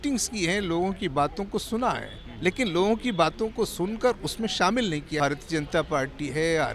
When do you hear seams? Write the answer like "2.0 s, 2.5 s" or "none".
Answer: 5.2 s